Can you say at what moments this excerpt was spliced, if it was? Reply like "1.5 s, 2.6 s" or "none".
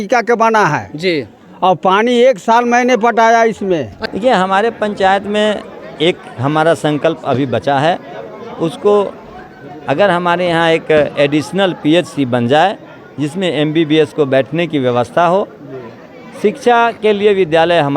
4.0 s